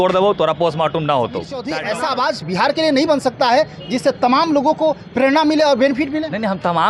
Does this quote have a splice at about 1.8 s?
yes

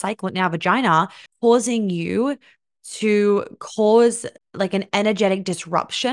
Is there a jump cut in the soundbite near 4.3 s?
yes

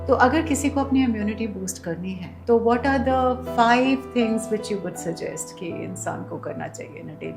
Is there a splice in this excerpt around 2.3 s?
yes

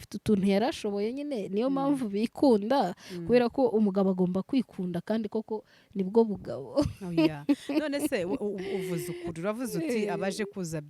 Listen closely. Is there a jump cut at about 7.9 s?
no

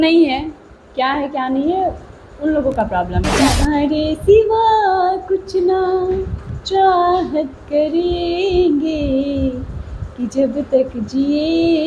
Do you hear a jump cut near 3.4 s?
yes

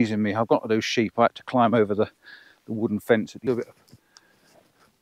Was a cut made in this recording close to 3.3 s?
yes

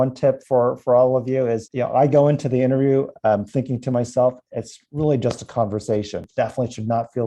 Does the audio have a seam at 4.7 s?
no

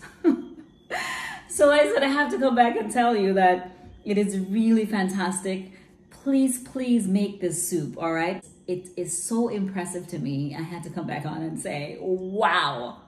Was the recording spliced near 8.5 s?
yes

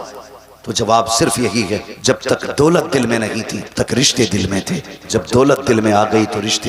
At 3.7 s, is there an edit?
yes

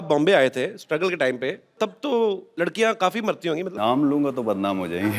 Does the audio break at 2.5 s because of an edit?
yes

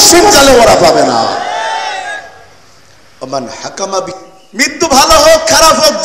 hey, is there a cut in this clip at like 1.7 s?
no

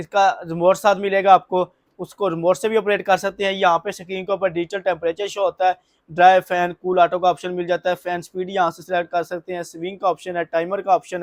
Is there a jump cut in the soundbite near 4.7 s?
no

